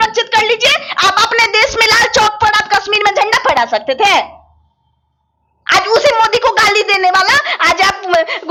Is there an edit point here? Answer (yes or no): no